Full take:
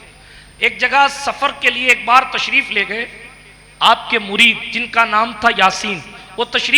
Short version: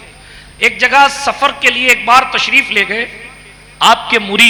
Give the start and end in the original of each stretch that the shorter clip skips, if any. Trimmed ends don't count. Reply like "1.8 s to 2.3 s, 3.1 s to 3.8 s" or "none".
none